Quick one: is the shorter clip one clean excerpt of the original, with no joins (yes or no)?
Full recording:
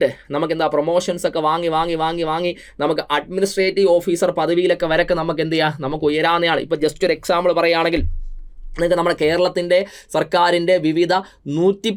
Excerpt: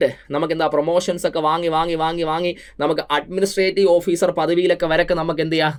yes